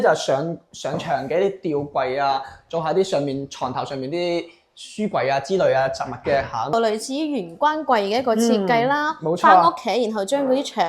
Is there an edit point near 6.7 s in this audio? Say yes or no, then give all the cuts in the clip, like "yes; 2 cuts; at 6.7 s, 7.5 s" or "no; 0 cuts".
yes; 1 cut; at 6.7 s